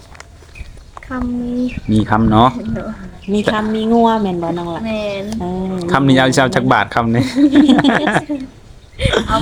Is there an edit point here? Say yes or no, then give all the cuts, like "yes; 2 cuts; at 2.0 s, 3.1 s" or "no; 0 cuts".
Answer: no; 0 cuts